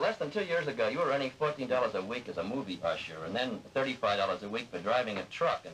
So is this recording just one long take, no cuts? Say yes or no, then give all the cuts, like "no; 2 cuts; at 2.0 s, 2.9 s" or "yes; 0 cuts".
yes; 0 cuts